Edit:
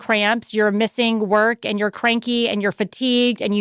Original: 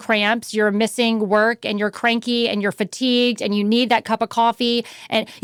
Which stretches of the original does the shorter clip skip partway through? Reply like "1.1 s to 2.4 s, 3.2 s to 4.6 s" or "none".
none